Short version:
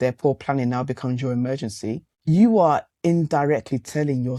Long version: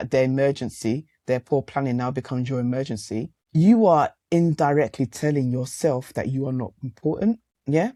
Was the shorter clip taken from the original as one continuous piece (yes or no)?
yes